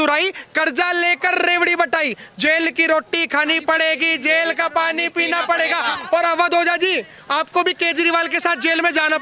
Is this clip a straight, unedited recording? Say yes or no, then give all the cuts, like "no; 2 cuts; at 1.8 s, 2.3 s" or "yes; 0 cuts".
yes; 0 cuts